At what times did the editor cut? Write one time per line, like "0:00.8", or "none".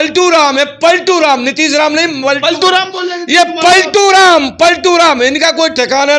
none

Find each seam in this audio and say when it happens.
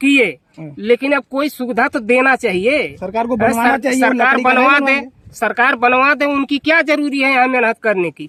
none

